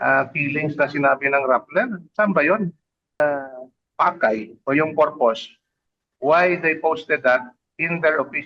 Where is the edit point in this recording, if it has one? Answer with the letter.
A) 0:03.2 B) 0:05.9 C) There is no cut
A